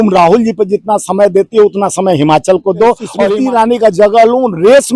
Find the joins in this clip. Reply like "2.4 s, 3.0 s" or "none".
3.1 s